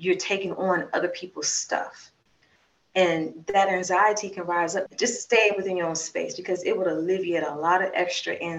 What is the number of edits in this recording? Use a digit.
1